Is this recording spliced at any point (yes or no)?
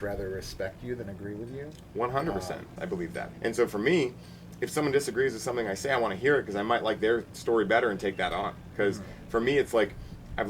yes